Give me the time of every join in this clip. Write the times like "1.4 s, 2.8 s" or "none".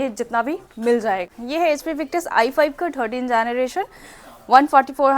1.3 s